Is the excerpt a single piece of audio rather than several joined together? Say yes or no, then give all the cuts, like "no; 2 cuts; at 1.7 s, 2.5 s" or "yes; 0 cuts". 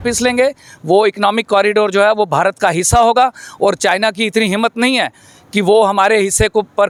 yes; 0 cuts